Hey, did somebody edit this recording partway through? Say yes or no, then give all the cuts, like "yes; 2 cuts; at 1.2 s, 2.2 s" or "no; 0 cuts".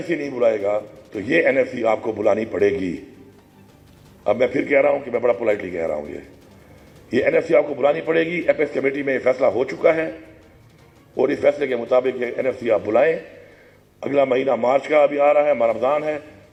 no; 0 cuts